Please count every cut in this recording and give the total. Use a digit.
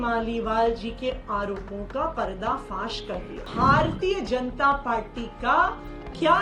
1